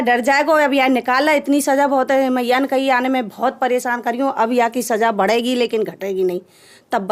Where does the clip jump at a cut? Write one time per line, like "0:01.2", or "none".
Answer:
none